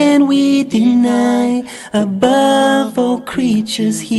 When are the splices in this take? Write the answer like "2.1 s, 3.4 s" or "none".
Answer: none